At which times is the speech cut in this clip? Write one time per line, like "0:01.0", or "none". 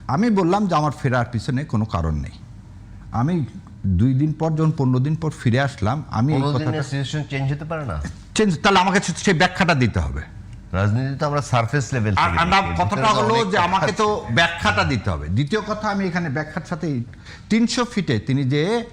none